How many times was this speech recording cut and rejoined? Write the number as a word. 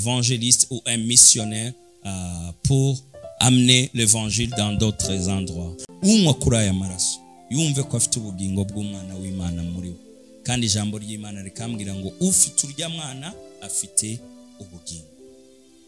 one